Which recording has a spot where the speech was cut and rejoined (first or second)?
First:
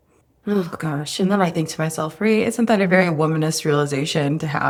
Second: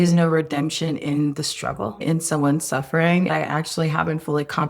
second